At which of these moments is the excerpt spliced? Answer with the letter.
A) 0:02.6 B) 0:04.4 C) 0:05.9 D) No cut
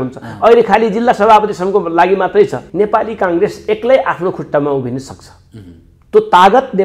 A